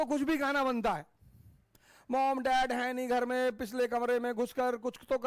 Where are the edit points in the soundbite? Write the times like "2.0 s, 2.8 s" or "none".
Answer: none